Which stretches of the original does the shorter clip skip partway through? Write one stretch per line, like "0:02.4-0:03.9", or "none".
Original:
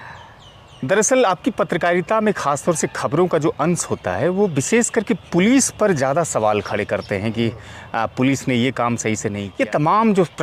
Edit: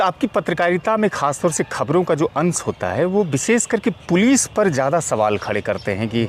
none